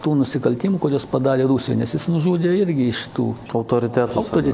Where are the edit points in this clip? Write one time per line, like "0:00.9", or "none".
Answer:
0:03.4